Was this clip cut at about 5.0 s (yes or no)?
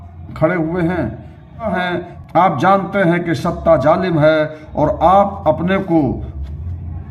no